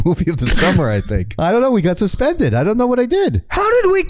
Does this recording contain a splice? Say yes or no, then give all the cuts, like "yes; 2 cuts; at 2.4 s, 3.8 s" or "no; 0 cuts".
yes; 1 cut; at 1.2 s